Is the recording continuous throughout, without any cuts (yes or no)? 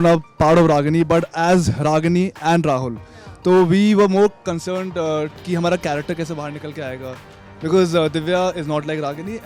yes